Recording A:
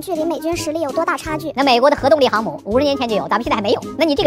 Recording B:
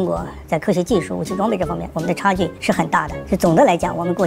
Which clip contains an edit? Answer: A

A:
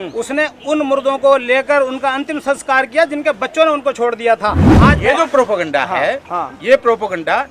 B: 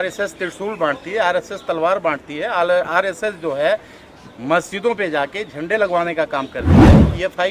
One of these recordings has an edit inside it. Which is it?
A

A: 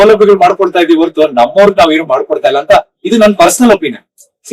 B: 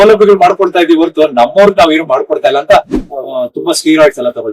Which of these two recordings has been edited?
B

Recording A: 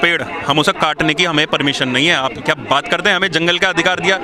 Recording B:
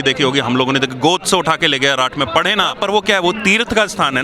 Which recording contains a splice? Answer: B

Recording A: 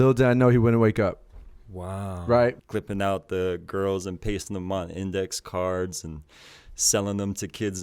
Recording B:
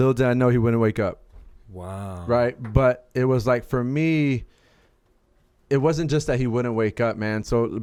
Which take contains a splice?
A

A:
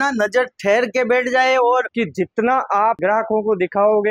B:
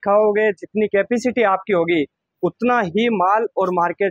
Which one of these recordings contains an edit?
A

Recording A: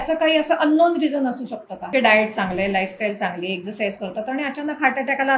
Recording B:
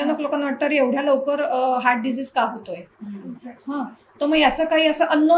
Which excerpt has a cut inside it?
A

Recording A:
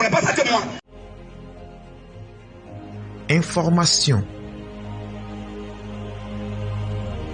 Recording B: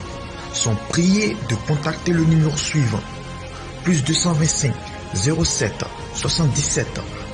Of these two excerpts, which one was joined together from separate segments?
A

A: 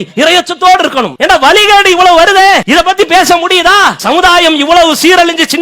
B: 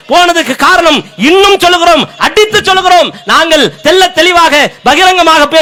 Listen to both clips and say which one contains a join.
A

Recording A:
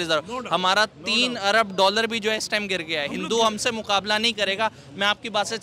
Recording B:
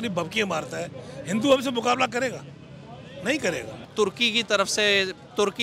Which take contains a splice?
B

